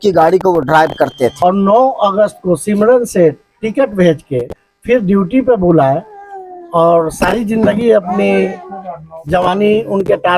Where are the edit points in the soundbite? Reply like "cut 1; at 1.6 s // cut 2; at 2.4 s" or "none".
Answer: cut 1; at 1.3 s